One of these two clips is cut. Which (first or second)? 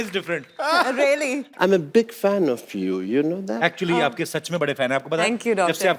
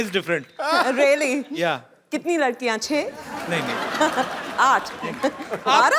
first